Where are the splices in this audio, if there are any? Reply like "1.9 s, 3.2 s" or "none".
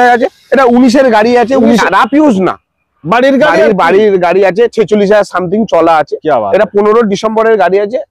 1.8 s